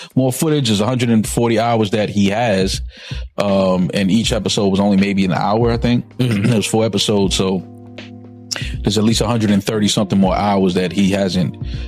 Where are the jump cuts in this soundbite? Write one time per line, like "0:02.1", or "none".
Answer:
none